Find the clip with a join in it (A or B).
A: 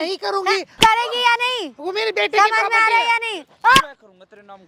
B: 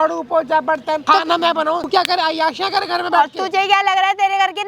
B